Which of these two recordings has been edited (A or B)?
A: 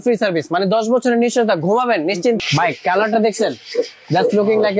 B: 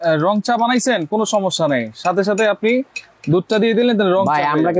A